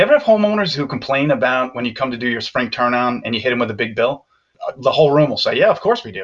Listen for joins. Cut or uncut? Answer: uncut